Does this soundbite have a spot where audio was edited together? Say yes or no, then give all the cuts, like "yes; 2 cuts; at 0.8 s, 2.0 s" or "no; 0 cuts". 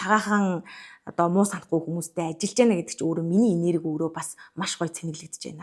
no; 0 cuts